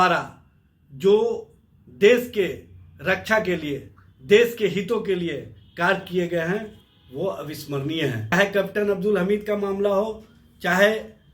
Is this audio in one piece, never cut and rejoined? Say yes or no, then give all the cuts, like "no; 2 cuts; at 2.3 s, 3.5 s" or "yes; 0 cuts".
no; 1 cut; at 8.3 s